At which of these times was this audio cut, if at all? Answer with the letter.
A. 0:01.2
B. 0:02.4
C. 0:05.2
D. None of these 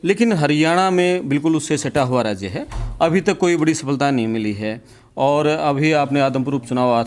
D